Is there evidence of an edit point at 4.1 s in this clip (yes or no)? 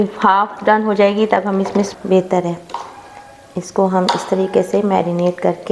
no